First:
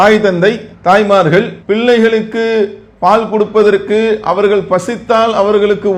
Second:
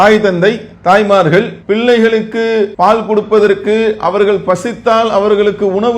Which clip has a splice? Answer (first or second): second